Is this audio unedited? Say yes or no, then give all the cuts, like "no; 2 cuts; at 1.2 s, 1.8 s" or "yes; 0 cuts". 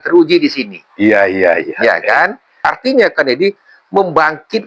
no; 1 cut; at 2.6 s